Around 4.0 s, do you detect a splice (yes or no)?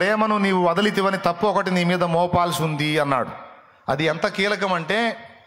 yes